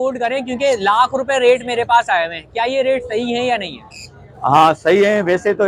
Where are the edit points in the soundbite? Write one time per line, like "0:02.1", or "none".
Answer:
none

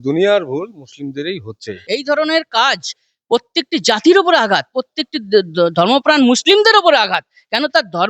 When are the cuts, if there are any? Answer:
0:01.8

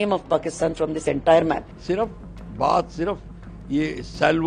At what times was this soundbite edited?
0:01.7

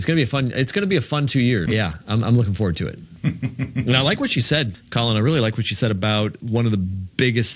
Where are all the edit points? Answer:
0:01.6
0:03.0
0:04.8

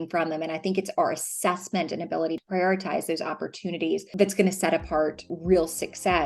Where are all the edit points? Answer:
0:02.4
0:04.1
0:05.3

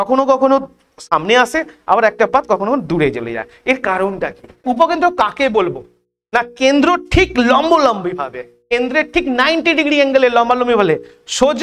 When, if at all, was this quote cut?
0:04.6

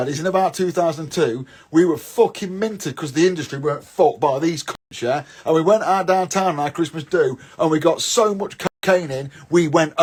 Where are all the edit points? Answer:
none

